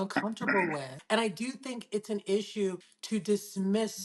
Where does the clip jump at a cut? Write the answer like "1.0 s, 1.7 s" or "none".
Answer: 0.9 s, 2.9 s